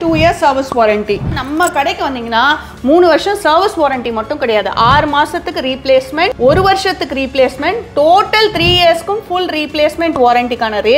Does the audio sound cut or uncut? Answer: cut